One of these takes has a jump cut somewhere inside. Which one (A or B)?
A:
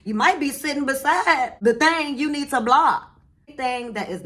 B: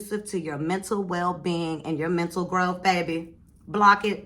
A